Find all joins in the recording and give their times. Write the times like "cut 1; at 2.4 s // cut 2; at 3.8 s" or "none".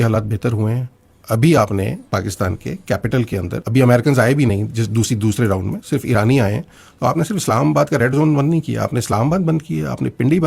none